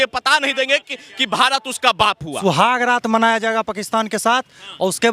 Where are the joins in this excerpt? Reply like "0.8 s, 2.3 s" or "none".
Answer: 2.4 s